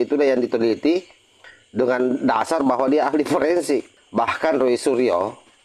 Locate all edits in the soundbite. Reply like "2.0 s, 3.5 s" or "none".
4.0 s